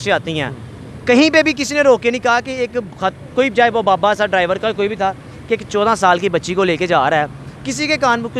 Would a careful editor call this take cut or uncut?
uncut